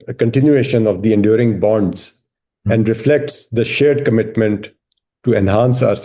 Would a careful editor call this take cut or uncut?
uncut